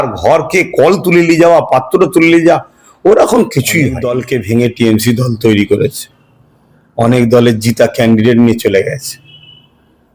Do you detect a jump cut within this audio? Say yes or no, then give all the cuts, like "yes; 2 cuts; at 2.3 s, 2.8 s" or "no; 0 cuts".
yes; 1 cut; at 4.1 s